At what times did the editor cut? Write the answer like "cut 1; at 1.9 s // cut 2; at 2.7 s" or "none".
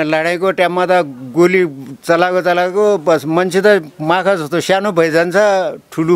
none